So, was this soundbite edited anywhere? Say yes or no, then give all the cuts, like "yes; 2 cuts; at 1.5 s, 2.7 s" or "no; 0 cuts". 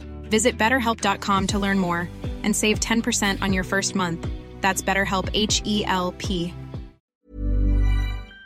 yes; 1 cut; at 7.1 s